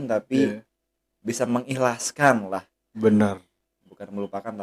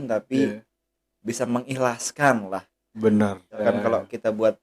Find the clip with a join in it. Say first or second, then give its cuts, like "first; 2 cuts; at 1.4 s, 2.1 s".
second; 1 cut; at 3.6 s